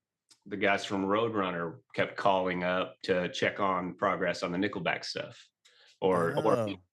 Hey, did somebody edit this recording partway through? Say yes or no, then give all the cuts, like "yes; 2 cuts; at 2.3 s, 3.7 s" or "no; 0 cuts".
no; 0 cuts